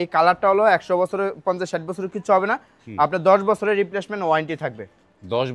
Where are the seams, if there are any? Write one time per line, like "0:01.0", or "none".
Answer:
none